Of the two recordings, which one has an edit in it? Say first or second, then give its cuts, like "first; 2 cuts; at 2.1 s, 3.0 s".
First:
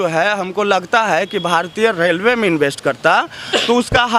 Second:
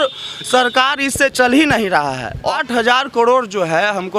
second; 1 cut; at 2.5 s